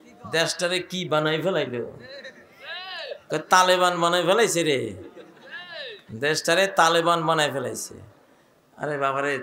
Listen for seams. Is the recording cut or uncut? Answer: uncut